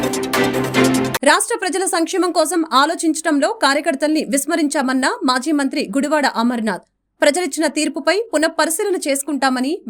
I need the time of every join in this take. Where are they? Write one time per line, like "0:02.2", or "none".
none